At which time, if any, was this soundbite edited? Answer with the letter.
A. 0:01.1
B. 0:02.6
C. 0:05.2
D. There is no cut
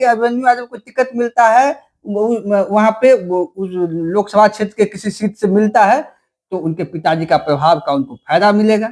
D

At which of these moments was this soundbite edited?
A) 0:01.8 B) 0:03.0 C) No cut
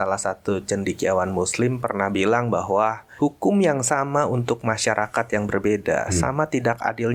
B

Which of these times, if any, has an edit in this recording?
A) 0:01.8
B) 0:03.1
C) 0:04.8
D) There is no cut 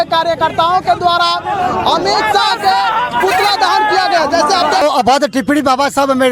C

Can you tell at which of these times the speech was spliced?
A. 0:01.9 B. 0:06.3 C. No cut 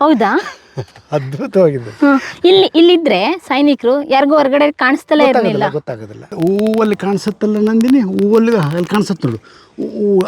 B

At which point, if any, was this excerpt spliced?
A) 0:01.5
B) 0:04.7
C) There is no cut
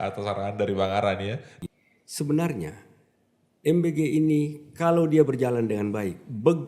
A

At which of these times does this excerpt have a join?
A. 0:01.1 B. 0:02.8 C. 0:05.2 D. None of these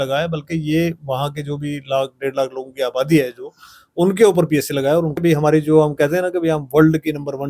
C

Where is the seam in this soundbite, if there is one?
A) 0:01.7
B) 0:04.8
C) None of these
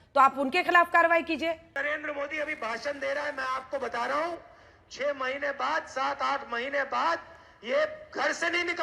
A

